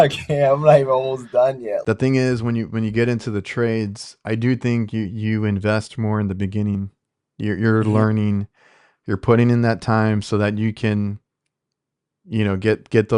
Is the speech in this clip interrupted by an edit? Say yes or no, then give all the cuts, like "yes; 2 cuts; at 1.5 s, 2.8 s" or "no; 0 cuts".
yes; 1 cut; at 1.8 s